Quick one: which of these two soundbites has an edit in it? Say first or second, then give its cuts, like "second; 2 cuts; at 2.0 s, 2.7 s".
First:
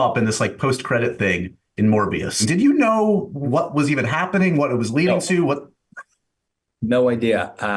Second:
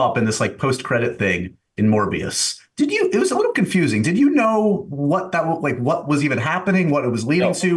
first; 2 cuts; at 2.4 s, 3.4 s